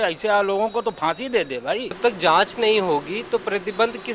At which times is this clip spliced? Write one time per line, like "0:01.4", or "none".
0:02.0